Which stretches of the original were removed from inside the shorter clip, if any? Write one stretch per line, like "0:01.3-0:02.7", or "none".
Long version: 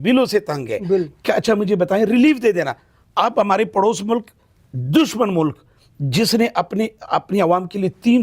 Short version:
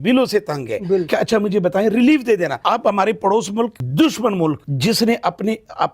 0:01.1-0:01.2
0:02.7-0:03.1
0:04.3-0:04.8
0:05.6-0:06.0